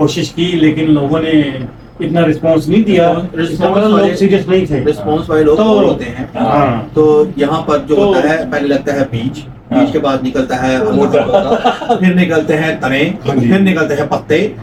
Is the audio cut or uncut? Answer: uncut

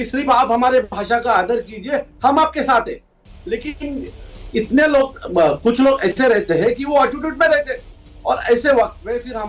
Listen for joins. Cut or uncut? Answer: uncut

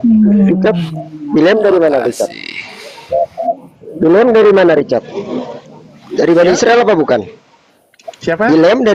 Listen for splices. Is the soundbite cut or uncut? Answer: uncut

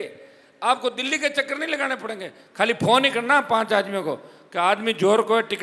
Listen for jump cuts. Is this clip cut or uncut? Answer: uncut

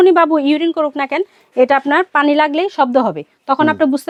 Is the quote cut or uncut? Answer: uncut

